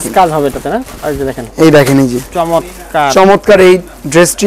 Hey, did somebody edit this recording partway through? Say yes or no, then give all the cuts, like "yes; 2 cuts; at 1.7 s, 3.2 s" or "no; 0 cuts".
no; 0 cuts